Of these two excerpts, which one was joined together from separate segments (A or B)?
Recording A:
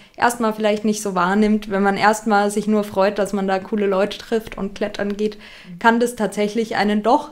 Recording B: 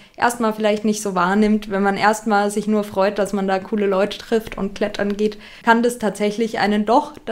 B